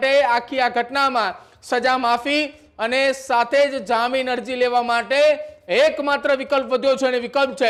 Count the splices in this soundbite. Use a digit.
0